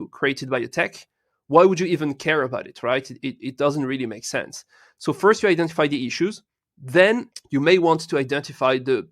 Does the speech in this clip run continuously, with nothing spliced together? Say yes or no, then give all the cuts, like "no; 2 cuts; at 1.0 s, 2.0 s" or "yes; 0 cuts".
no; 1 cut; at 7.3 s